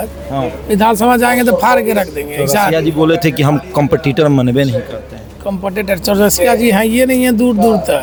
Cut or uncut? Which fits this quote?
uncut